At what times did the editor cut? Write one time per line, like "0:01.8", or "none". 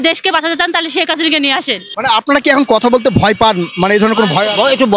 0:01.8